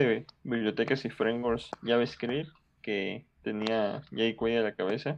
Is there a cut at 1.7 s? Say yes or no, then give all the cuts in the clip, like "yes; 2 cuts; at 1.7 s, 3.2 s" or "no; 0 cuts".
yes; 1 cut; at 1.7 s